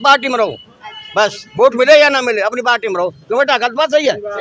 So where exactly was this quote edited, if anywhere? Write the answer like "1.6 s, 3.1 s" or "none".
none